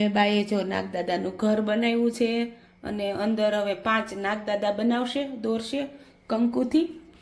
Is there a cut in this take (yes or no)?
no